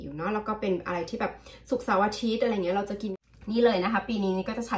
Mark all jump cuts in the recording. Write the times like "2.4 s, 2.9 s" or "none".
3.1 s